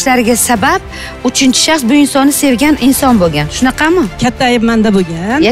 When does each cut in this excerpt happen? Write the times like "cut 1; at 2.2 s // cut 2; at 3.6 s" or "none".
cut 1; at 4.1 s